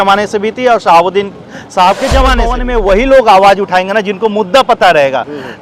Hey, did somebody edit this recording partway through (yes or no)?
yes